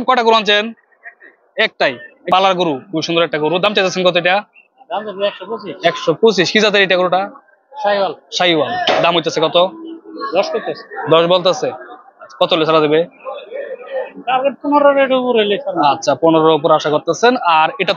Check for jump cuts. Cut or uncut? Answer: cut